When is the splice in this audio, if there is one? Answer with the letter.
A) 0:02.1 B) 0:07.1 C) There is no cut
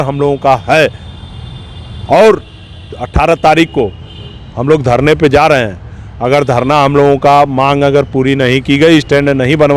C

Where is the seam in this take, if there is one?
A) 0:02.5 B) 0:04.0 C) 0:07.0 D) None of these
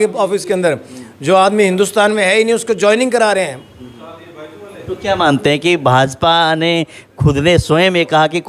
D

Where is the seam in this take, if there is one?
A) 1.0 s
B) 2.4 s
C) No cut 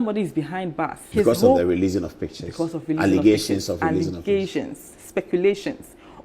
A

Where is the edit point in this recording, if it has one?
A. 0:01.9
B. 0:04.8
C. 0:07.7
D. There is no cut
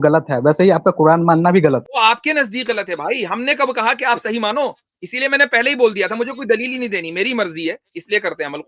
A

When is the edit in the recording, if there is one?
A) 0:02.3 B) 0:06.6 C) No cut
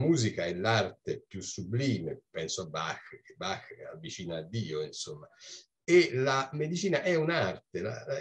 A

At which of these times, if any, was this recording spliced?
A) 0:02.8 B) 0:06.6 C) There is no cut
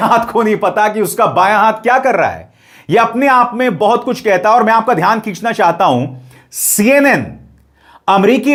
C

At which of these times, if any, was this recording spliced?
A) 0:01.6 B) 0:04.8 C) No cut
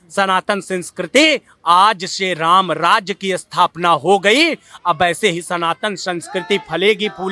C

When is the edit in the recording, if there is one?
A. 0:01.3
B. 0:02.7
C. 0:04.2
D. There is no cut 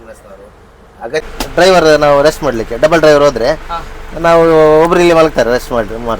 A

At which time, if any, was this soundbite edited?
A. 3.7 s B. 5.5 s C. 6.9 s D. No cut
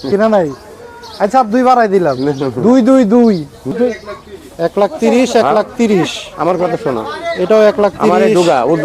A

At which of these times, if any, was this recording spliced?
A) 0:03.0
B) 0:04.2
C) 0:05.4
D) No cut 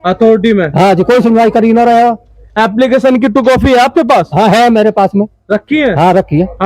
D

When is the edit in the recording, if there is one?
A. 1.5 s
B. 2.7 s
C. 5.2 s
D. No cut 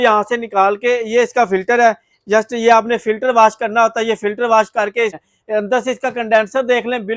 C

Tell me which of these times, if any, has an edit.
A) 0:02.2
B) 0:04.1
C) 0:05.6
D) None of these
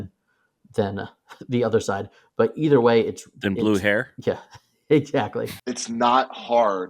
C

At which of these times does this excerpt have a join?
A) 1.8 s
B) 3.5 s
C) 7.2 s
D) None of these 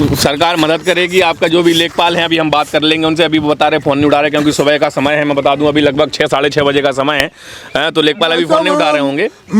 D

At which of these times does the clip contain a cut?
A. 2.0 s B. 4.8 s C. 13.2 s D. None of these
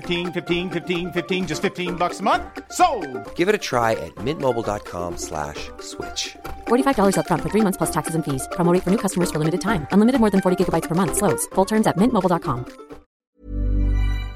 C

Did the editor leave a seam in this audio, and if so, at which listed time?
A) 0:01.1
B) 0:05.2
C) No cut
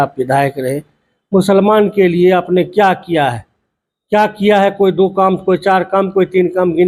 C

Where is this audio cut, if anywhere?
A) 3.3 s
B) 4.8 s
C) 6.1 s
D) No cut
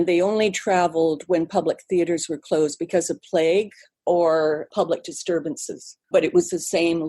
C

